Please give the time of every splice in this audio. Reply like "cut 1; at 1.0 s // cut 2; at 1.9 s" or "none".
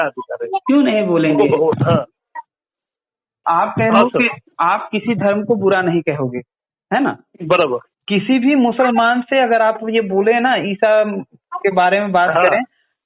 cut 1; at 3.4 s // cut 2; at 7.9 s